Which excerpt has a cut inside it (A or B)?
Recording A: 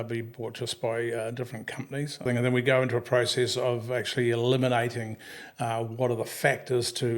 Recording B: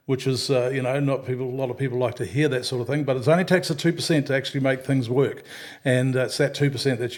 A